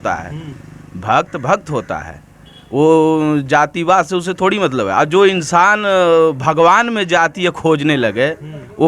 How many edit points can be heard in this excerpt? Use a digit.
0